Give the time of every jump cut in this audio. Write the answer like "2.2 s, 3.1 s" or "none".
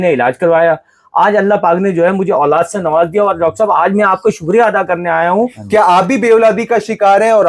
5.6 s